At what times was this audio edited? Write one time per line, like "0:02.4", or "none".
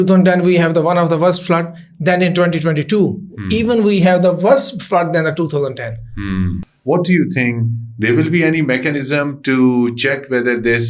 0:06.7